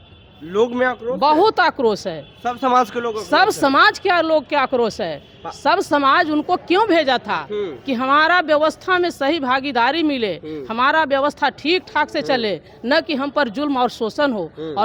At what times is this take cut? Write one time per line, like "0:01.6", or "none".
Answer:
none